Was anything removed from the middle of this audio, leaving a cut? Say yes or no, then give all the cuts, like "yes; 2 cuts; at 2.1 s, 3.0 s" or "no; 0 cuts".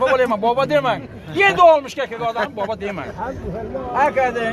no; 0 cuts